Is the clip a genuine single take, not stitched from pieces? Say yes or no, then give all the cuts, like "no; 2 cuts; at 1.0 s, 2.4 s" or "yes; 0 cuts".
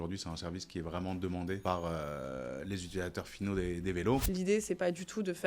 no; 2 cuts; at 1.6 s, 4.2 s